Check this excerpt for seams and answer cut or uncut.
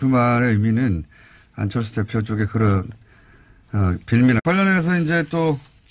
uncut